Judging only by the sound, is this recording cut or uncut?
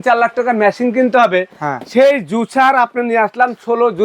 cut